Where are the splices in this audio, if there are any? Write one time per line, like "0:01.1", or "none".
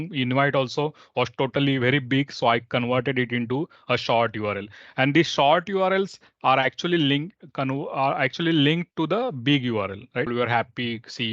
0:10.3